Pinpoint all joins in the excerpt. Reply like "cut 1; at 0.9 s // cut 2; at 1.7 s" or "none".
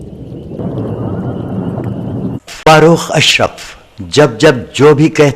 cut 1; at 2.4 s // cut 2; at 3.0 s

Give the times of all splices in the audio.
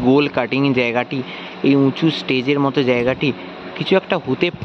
none

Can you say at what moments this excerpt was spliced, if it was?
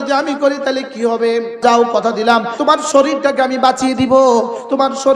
cut 1; at 1.6 s // cut 2; at 2.5 s

